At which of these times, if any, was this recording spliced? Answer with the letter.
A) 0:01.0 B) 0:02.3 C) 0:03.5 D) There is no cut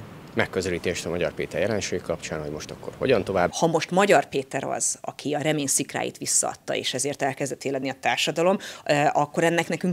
C